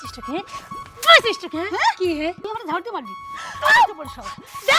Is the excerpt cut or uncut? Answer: cut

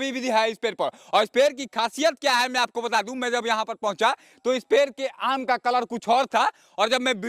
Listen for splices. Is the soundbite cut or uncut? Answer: uncut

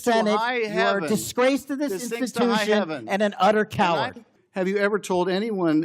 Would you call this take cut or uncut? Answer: cut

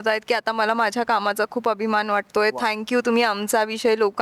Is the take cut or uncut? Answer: uncut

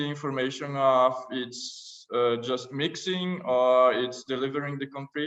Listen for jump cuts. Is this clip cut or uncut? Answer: uncut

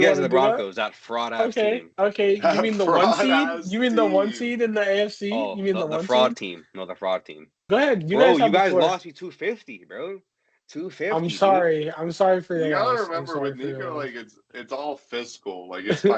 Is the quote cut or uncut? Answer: cut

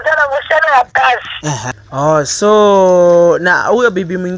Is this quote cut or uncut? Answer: cut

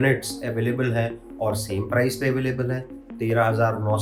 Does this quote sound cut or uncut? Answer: uncut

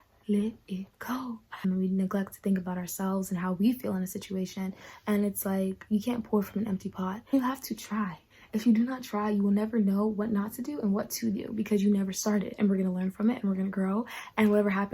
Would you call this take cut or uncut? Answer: cut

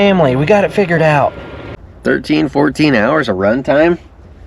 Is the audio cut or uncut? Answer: cut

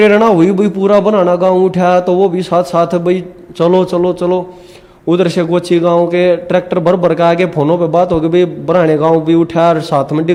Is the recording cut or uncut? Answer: uncut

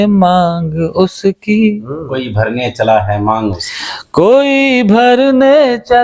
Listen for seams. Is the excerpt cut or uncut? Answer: uncut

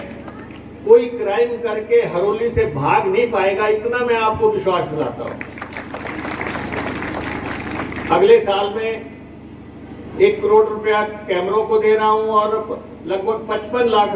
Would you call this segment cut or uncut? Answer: uncut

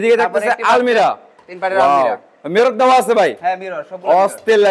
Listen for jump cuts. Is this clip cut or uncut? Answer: uncut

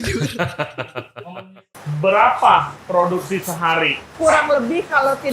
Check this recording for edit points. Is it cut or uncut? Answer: cut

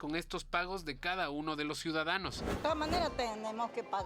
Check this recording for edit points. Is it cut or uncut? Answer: cut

